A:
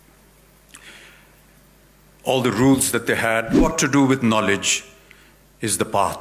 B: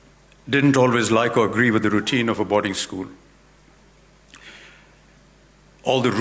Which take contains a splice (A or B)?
A